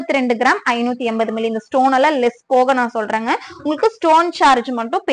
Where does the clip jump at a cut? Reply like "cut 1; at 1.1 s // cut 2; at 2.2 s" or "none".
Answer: none